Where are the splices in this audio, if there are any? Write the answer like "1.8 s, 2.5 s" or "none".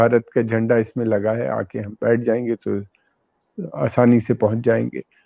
none

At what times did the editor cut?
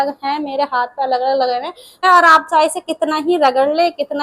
2.0 s

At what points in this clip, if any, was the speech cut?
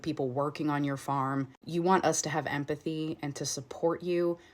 none

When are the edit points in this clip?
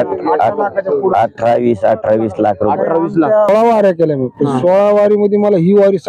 3.5 s

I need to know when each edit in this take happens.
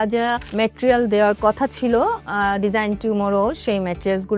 none

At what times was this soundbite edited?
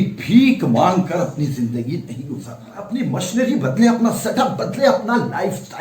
2.8 s

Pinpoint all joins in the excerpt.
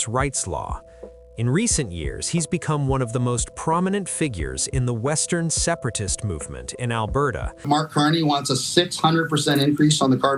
7.6 s

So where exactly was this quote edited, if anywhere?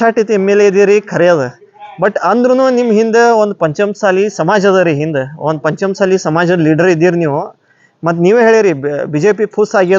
none

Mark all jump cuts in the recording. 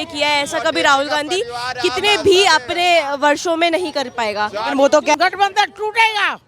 5.1 s

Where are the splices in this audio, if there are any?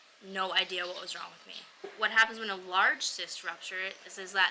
1.8 s

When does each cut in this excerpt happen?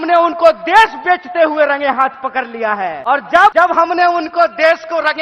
3.0 s, 3.5 s

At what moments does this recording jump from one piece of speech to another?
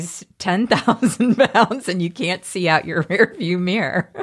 none

